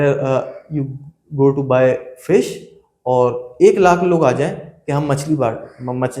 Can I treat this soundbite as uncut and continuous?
yes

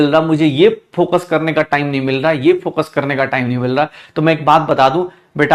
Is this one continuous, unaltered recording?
yes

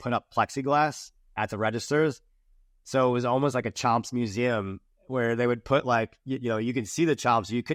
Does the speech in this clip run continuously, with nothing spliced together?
yes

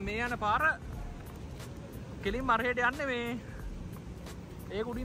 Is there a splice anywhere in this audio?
no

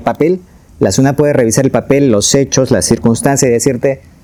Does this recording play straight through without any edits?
yes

